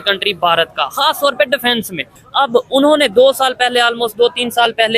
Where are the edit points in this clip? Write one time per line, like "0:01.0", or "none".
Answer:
0:02.2